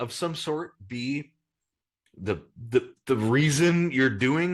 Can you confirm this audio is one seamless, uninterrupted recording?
yes; 0 cuts

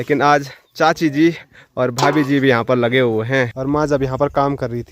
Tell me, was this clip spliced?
yes; 1 cut; at 3.6 s

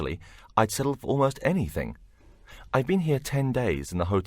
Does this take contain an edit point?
yes; 1 cut; at 1.0 s

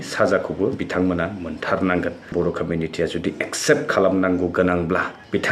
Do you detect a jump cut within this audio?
yes; 1 cut; at 2.3 s

